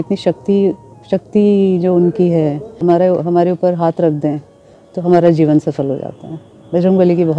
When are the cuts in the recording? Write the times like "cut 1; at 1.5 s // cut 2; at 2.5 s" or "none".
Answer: cut 1; at 2.8 s

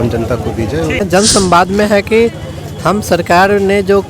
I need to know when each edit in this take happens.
cut 1; at 1.0 s

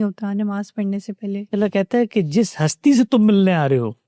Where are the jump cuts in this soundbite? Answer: cut 1; at 1.5 s

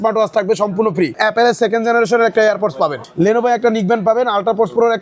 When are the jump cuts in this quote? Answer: cut 1; at 1.2 s // cut 2; at 3.0 s

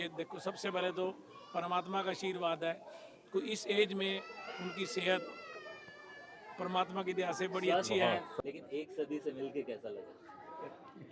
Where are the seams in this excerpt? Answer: cut 1; at 8.3 s

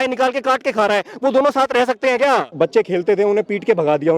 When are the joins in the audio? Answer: cut 1; at 2.5 s

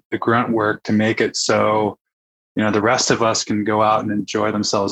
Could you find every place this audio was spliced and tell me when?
none

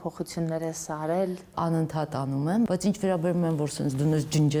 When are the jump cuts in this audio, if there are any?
cut 1; at 1.5 s // cut 2; at 2.7 s

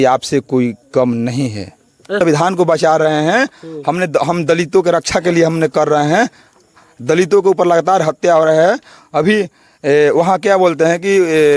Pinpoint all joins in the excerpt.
cut 1; at 2.2 s

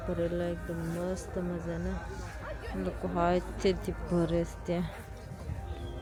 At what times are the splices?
none

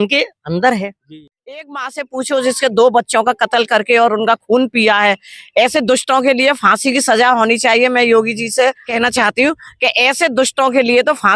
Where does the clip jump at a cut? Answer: cut 1; at 1.1 s // cut 2; at 8.9 s

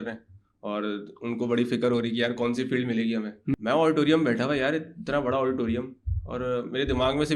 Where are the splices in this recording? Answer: cut 1; at 3.5 s

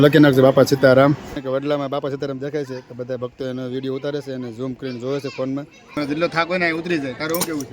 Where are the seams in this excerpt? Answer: cut 1; at 1.4 s // cut 2; at 6.0 s

